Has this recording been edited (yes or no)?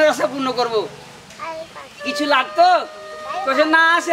no